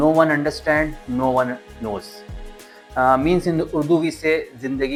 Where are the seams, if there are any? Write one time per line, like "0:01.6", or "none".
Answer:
none